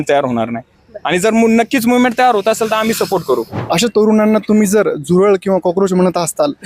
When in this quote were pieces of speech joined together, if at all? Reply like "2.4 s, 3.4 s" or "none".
3.6 s